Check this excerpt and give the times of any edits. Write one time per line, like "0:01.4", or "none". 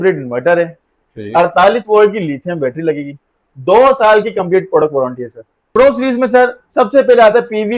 0:05.7